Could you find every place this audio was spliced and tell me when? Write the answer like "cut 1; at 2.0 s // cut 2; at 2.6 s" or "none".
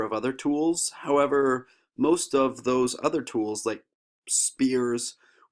cut 1; at 3.3 s